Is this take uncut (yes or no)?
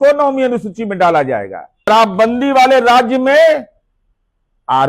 no